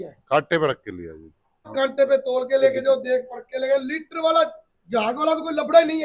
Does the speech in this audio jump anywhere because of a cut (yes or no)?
yes